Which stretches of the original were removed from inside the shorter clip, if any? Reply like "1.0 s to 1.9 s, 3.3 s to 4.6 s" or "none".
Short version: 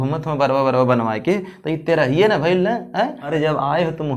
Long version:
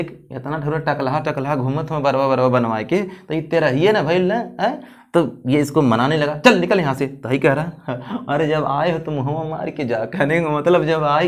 4.9 s to 8.3 s